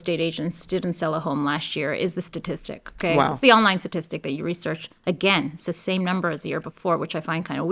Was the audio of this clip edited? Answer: no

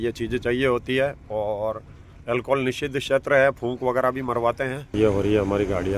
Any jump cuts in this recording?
yes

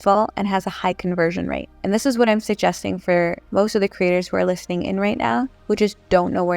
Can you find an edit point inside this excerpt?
yes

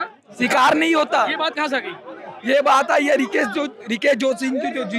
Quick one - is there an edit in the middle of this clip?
no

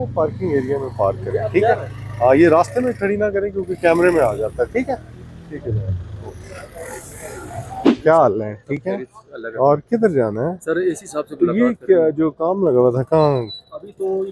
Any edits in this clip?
no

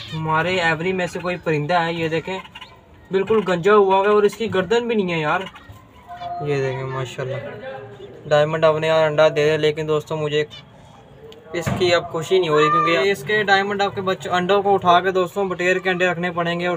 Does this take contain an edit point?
yes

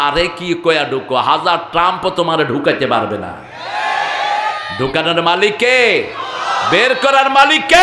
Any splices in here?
no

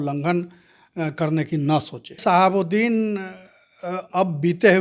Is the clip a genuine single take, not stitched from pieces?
no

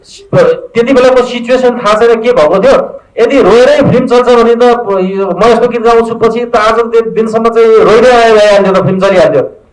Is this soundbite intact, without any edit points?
yes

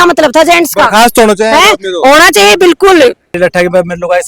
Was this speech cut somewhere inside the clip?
yes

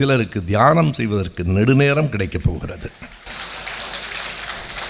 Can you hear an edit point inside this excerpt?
no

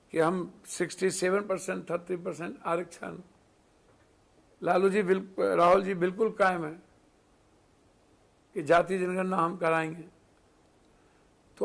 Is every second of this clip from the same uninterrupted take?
yes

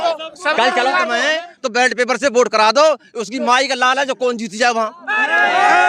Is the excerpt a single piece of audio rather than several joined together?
no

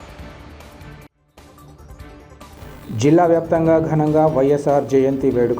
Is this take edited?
yes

